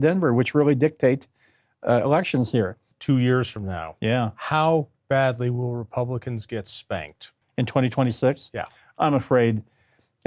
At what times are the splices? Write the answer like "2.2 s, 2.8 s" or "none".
2.9 s